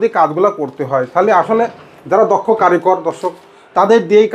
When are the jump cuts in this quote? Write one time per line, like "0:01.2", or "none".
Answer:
none